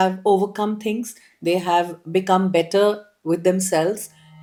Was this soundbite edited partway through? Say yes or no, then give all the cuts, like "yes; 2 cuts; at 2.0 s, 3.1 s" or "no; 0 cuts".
no; 0 cuts